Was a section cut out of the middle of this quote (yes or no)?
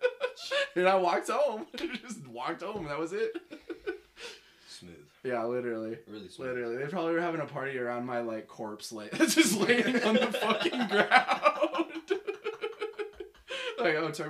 no